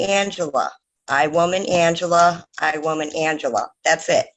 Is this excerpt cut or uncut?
uncut